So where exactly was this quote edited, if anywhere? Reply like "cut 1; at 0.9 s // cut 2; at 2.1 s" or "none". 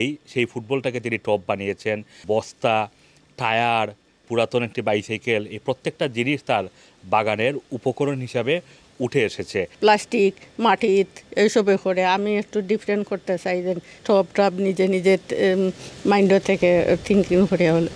cut 1; at 2.2 s // cut 2; at 4.3 s // cut 3; at 9.7 s // cut 4; at 14.0 s